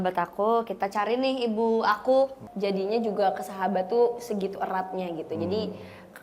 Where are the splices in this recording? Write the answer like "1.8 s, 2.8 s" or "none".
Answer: 2.4 s